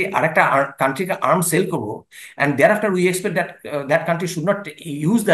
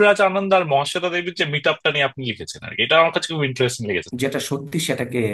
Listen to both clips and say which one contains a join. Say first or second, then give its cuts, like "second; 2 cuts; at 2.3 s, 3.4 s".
second; 1 cut; at 4.1 s